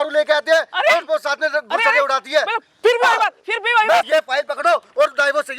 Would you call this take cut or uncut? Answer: cut